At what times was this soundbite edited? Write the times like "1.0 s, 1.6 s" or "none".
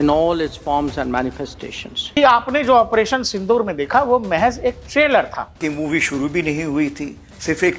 2.0 s, 5.6 s